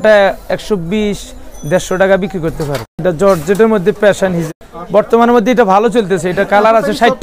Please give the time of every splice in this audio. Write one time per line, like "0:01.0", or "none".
0:03.0
0:04.5